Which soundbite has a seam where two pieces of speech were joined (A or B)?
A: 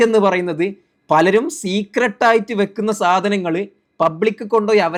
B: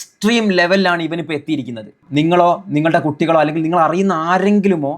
B